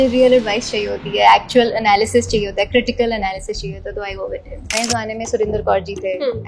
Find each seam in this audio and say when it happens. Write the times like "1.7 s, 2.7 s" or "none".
4.8 s